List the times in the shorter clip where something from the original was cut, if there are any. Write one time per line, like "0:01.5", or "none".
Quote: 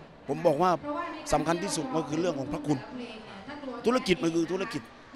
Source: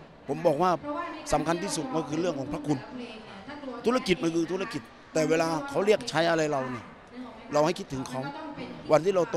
none